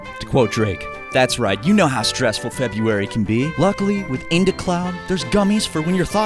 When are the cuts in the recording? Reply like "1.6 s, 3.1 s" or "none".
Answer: 1.0 s